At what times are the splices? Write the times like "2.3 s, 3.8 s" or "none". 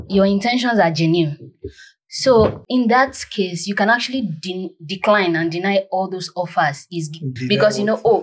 2.6 s, 7.3 s